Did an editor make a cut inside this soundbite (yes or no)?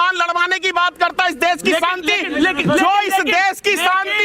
no